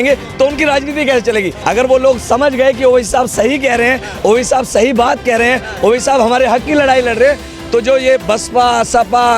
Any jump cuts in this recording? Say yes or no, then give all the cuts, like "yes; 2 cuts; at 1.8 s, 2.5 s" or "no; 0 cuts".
yes; 1 cut; at 1.5 s